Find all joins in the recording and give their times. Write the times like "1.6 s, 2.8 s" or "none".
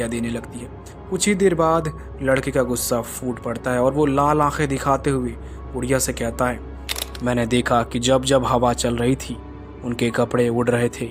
7.0 s